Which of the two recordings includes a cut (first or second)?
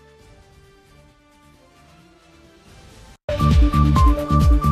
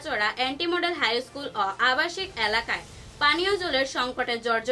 first